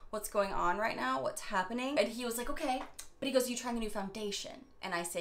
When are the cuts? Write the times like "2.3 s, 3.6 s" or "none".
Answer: 2.0 s, 3.0 s